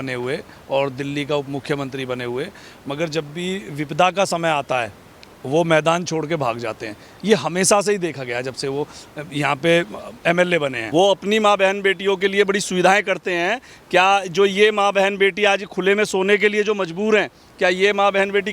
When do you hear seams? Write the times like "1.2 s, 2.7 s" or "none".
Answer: 10.8 s